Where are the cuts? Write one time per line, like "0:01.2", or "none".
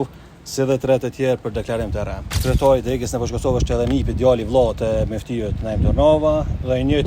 0:02.3